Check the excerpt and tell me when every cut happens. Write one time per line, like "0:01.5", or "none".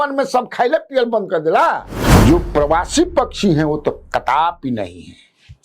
0:02.0